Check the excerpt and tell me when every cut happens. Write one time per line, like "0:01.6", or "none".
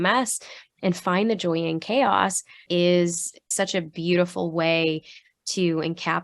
0:02.6
0:03.5